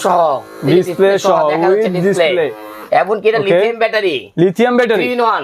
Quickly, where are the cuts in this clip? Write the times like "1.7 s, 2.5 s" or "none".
none